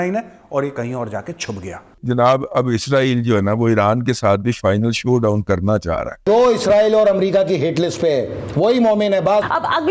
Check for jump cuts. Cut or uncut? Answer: cut